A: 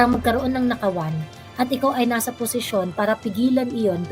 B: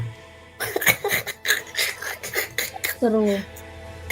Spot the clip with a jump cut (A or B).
B